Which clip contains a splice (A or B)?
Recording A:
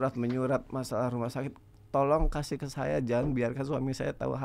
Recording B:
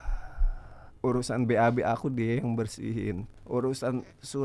B